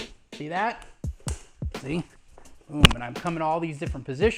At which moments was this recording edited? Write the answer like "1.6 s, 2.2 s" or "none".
none